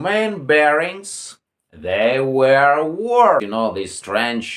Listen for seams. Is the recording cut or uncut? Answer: cut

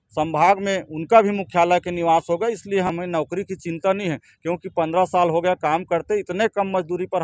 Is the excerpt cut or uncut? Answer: cut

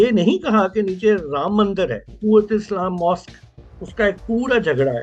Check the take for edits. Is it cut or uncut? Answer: cut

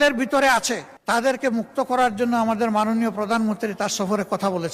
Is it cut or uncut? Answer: cut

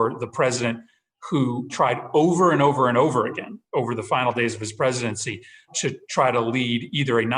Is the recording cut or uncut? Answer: cut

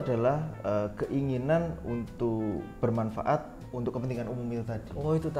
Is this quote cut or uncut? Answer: cut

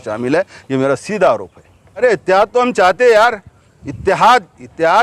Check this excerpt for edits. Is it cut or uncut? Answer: cut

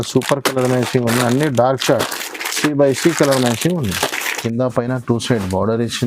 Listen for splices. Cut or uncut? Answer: cut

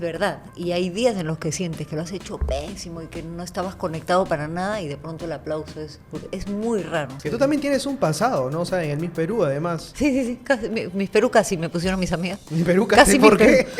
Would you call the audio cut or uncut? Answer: cut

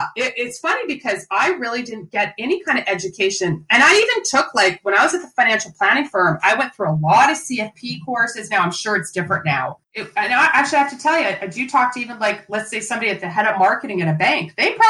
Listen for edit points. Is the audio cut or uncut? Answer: cut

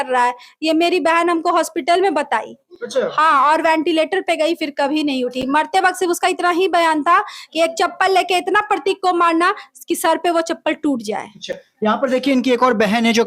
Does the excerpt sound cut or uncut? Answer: uncut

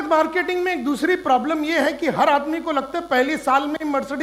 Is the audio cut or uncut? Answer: uncut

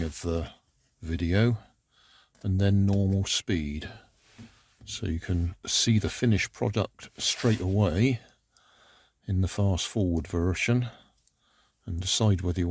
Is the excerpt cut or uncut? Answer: uncut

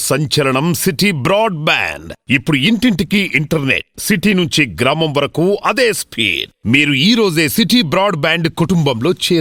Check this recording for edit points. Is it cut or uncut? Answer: uncut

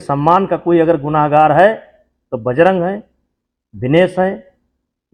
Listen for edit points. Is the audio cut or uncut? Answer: uncut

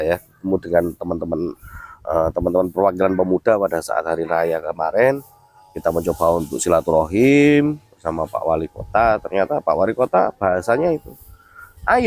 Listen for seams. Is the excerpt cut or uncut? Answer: uncut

